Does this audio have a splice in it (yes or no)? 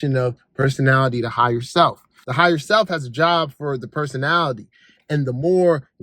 yes